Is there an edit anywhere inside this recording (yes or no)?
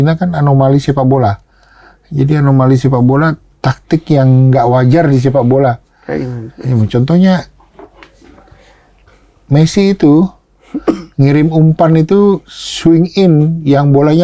no